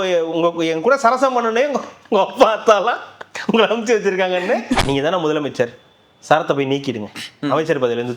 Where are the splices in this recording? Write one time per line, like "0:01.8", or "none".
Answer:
0:04.8